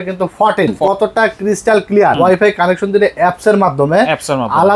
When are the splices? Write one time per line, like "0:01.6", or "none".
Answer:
0:00.8
0:02.2

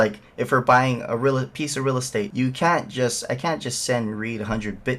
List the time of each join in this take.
0:02.3

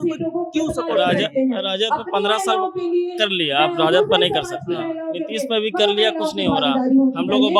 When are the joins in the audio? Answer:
none

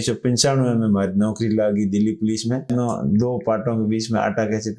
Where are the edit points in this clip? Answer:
0:02.7

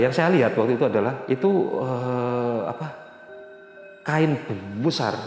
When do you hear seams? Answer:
0:01.2

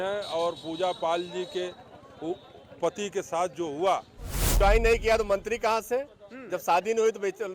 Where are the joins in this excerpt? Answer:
0:04.5

